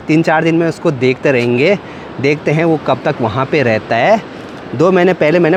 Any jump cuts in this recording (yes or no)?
no